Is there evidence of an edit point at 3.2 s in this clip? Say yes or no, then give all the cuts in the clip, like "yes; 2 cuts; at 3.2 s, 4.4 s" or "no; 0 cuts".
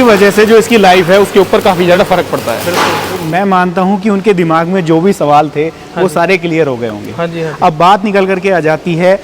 yes; 1 cut; at 3.2 s